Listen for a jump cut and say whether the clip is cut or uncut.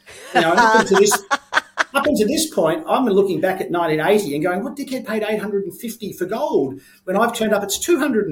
uncut